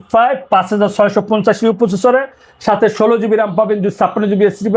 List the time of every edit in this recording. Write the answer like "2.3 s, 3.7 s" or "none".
none